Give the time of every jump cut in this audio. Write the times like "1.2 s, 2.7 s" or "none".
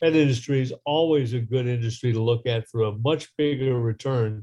none